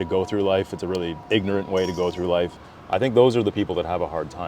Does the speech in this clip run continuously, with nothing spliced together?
no; 2 cuts; at 1.2 s, 2.6 s

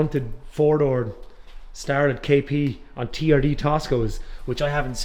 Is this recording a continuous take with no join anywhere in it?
yes; 0 cuts

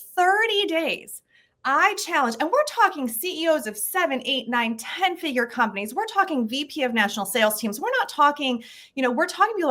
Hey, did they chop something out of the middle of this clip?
no; 0 cuts

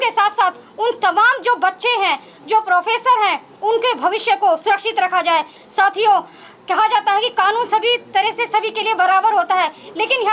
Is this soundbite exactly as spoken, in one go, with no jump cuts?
yes; 0 cuts

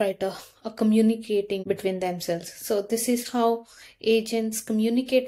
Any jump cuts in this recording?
yes; 1 cut; at 1.6 s

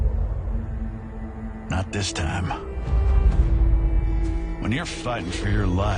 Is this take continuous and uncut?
yes; 0 cuts

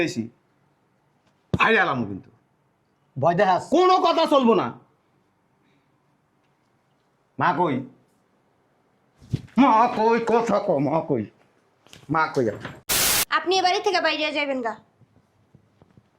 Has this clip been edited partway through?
yes; 1 cut; at 13.1 s

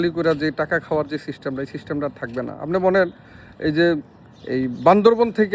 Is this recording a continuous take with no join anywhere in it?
yes; 0 cuts

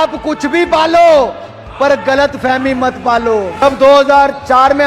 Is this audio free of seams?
no; 1 cut; at 3.6 s

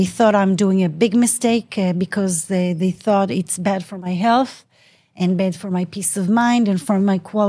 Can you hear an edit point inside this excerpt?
no; 0 cuts

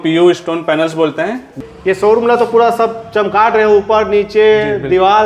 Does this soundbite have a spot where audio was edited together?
yes; 1 cut; at 1.6 s

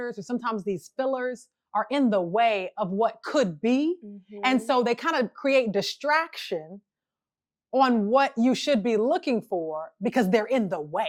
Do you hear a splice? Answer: no; 0 cuts

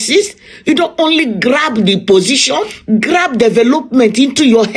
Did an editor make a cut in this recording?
yes; 1 cut; at 2.8 s

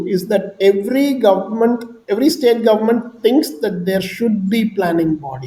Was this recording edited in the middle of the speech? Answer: no; 0 cuts

